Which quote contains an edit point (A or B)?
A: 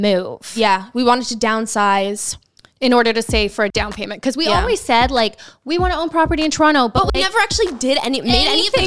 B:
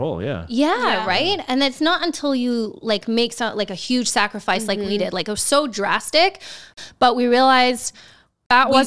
B